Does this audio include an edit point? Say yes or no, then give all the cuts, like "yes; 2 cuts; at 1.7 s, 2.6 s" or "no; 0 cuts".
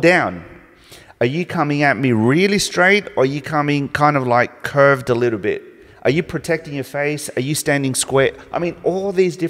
no; 0 cuts